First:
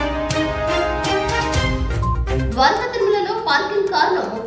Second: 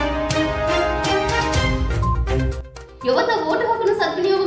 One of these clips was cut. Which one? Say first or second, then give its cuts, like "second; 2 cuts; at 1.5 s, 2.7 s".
first; 1 cut; at 2.4 s